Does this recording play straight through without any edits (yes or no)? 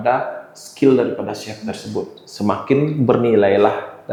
yes